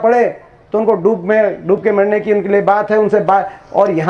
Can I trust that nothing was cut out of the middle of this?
yes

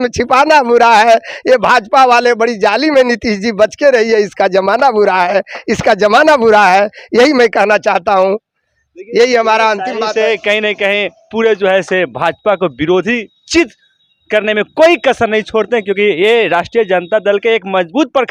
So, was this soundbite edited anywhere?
no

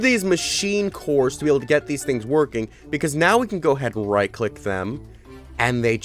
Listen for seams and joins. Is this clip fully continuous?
yes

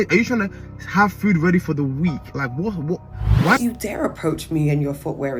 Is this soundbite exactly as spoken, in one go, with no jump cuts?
no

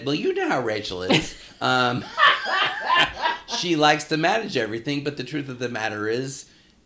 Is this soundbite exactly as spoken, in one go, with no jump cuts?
yes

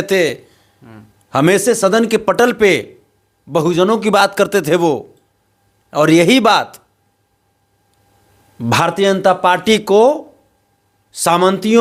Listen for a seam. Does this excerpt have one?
no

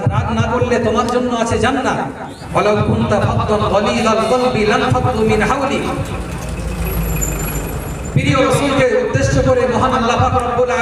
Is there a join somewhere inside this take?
yes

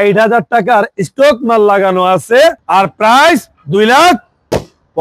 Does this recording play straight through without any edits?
no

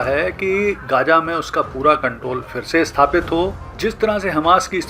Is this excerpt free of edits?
no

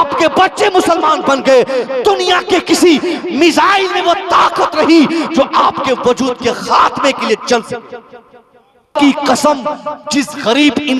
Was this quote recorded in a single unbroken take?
no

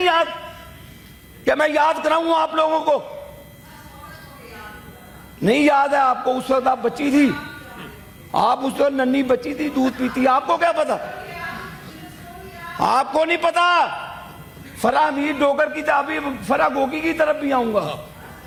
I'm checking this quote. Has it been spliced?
no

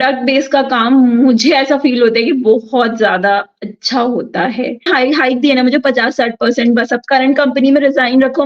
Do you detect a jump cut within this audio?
yes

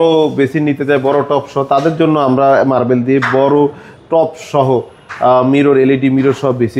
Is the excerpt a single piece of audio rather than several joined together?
yes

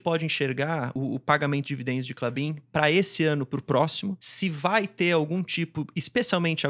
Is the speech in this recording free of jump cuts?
no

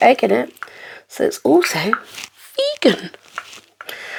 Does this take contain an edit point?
no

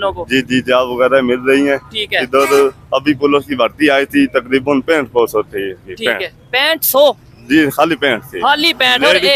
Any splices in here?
no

